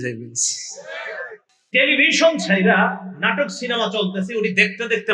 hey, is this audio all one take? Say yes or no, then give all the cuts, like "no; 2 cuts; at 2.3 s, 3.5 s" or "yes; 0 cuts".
no; 1 cut; at 1.5 s